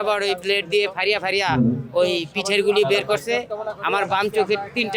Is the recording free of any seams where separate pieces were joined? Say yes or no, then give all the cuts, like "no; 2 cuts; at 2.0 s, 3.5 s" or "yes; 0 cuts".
yes; 0 cuts